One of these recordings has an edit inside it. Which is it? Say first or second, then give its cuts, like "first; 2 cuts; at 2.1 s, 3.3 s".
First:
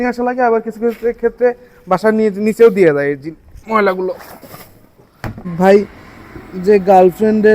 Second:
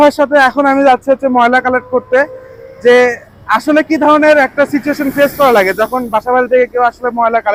first; 1 cut; at 5.5 s